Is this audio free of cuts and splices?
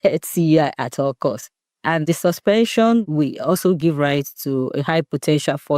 no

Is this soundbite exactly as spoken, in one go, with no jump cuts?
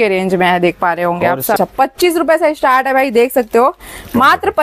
no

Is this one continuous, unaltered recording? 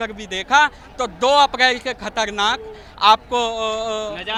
yes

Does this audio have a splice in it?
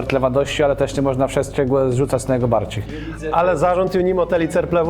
yes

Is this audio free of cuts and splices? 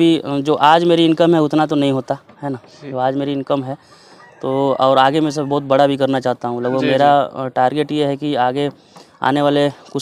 yes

